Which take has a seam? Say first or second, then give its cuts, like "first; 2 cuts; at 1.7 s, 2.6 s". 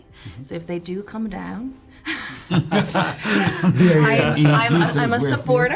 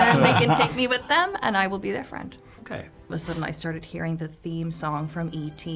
second; 1 cut; at 3.1 s